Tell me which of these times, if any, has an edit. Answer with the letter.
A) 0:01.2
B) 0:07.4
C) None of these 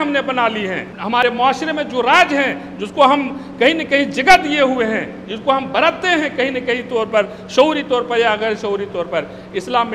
A